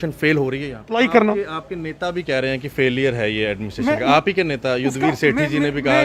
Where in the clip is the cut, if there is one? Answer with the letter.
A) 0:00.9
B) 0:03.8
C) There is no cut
A